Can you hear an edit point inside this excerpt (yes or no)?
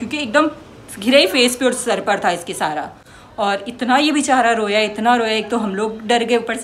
no